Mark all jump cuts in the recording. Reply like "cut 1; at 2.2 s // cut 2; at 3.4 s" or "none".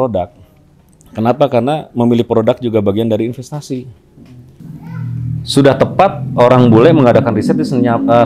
cut 1; at 4.5 s